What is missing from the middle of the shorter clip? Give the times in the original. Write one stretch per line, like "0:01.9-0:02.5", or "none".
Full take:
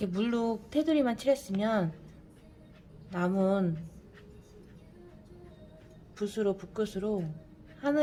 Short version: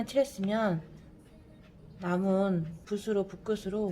0:03.9-0:06.1